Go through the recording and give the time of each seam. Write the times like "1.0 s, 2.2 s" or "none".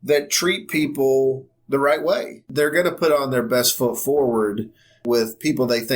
2.5 s, 5.0 s

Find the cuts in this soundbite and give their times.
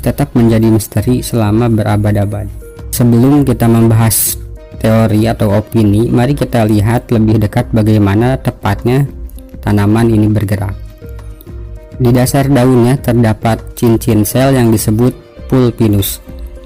none

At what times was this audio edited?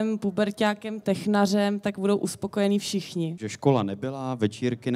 3.4 s

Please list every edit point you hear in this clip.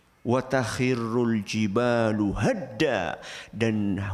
none

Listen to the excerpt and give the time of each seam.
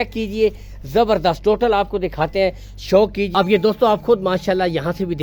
3.2 s

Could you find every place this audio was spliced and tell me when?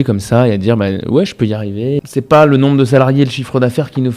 2.1 s

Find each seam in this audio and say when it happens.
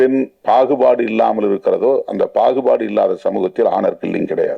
none

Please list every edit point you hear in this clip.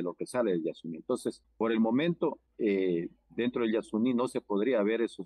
none

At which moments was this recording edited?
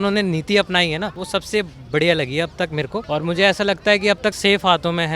1.2 s, 3.0 s, 4.4 s

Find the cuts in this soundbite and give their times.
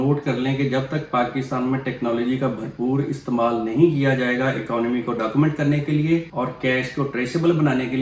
none

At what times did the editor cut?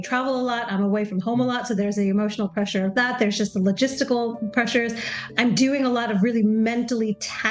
4.4 s

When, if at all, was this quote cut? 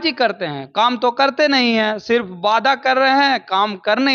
none

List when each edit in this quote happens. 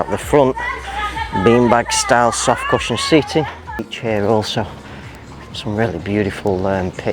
3.9 s

